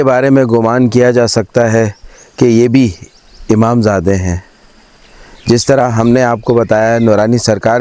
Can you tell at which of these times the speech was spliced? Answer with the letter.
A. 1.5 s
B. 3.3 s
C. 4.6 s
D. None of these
D